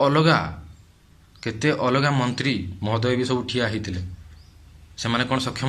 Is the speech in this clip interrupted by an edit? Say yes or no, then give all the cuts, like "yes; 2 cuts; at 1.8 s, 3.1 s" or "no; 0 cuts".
no; 0 cuts